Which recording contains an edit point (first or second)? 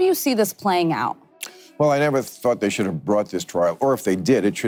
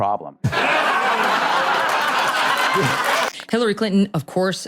second